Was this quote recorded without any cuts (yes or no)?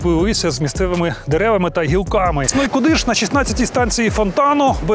no